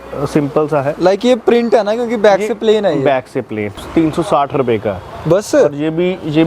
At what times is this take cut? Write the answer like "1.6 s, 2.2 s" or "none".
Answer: 3.8 s

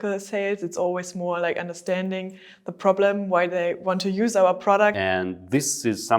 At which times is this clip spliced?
5.0 s

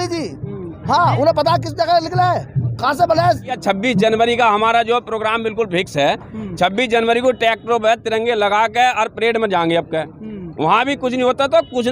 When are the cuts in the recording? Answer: 3.5 s

